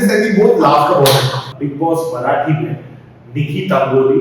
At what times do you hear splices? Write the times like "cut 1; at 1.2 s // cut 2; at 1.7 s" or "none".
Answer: cut 1; at 1.5 s